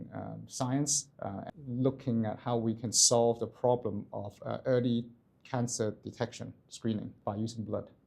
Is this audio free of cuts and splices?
no; 2 cuts; at 1.5 s, 7.2 s

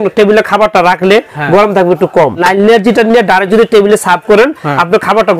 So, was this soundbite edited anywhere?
yes; 1 cut; at 2.4 s

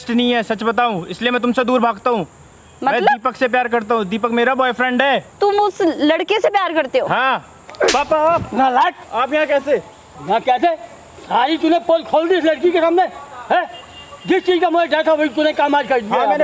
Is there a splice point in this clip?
yes; 3 cuts; at 5.3 s, 7.6 s, 9.0 s

